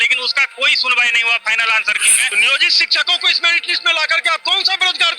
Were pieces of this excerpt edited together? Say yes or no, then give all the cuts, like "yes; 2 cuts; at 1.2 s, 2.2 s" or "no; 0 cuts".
yes; 1 cut; at 2.2 s